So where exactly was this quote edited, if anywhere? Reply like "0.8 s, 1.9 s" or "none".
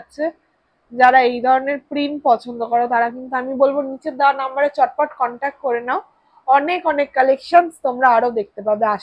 none